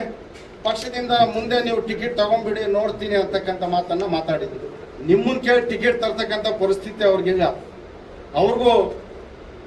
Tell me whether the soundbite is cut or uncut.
cut